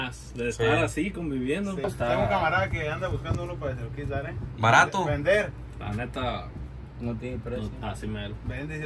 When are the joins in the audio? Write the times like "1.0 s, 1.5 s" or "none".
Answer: 1.8 s